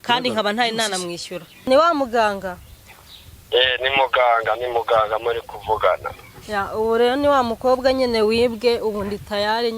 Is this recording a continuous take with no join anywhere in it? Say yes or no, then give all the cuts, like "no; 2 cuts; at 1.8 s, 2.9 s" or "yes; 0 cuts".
no; 1 cut; at 1.7 s